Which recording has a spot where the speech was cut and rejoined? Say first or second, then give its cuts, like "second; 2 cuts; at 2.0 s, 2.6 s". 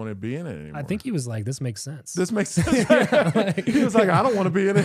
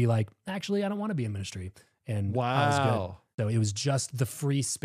second; 1 cut; at 3.2 s